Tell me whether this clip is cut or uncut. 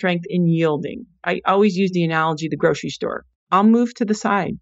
cut